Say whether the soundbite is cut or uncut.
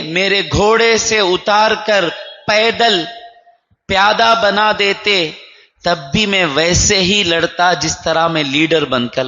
uncut